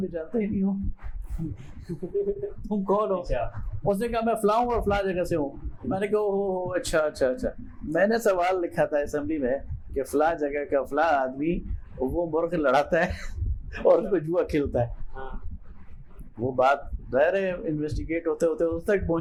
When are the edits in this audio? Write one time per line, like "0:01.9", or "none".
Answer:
none